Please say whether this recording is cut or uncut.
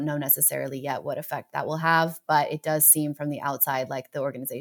uncut